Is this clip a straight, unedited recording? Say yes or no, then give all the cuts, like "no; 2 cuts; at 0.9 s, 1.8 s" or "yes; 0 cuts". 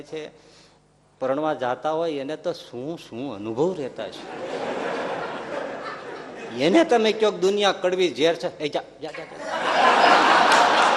yes; 0 cuts